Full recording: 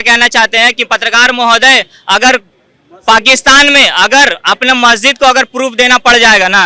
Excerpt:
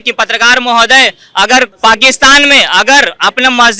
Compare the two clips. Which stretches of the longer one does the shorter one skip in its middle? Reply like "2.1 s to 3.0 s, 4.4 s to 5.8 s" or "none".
2.5 s to 3.0 s